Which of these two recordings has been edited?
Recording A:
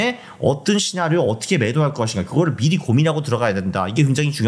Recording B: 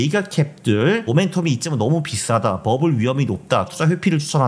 B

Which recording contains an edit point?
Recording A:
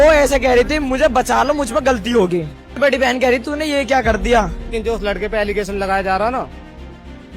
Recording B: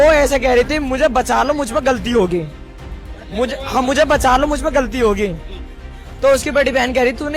A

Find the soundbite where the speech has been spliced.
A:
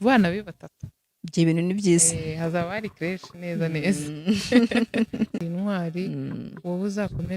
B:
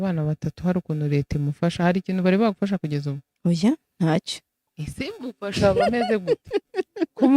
A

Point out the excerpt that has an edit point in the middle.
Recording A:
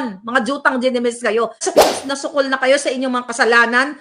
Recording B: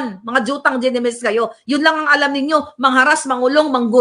A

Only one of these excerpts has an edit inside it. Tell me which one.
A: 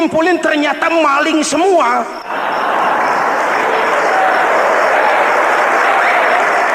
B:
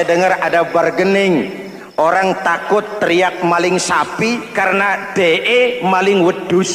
A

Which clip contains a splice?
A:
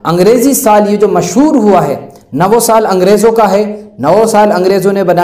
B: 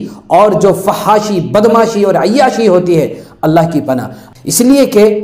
B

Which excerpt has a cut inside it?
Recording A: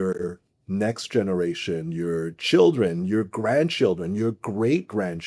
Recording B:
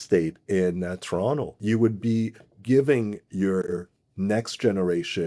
B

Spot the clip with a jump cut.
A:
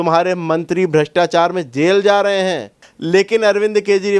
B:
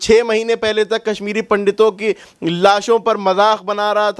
A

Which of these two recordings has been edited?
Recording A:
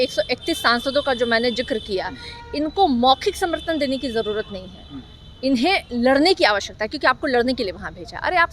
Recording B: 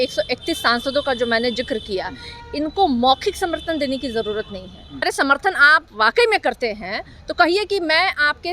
B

